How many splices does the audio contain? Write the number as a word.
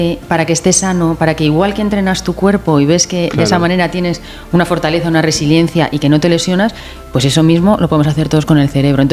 zero